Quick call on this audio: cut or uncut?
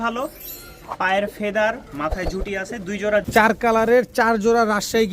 cut